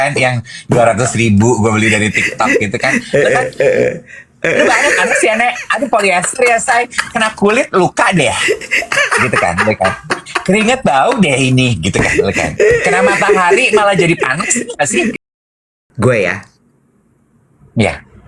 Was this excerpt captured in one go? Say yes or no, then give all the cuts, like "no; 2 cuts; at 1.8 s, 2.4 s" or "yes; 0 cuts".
no; 1 cut; at 15.2 s